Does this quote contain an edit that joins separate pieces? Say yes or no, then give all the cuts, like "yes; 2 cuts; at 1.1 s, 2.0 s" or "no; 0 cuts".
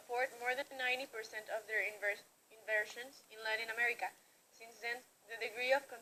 no; 0 cuts